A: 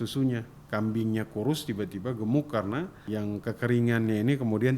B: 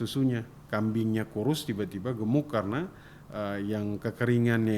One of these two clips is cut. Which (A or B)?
A